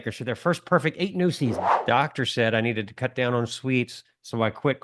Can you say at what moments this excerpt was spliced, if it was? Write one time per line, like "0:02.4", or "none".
0:01.7